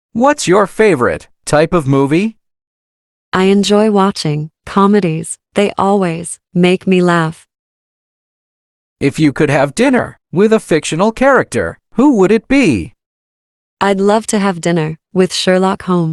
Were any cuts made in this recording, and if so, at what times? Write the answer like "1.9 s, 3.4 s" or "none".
none